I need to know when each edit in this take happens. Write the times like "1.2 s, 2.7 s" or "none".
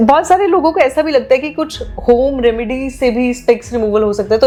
none